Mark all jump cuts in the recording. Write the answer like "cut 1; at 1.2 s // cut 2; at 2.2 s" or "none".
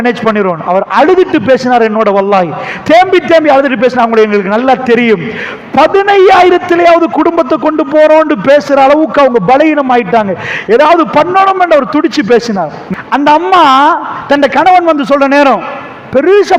cut 1; at 2.7 s // cut 2; at 12.8 s